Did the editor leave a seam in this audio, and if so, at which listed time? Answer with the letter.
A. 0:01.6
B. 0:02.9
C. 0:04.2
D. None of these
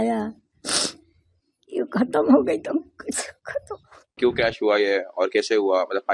C